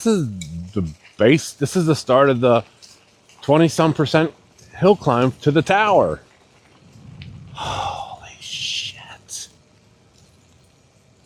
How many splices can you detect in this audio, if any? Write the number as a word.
zero